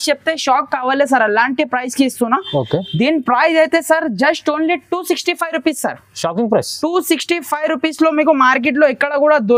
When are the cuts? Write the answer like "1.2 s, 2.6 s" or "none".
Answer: none